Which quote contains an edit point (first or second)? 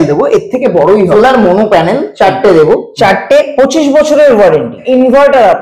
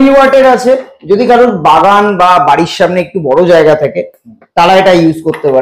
first